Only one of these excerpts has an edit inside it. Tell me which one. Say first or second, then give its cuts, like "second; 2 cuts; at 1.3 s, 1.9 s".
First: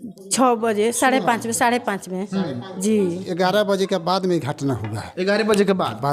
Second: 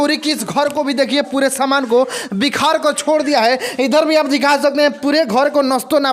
first; 1 cut; at 3.2 s